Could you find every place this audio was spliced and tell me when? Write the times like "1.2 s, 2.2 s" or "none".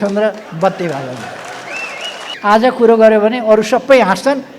2.3 s